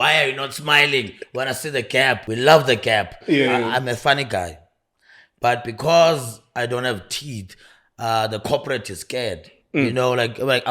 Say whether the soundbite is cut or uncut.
cut